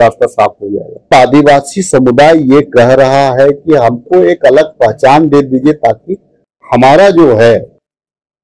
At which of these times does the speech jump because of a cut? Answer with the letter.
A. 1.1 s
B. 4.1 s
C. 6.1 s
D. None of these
A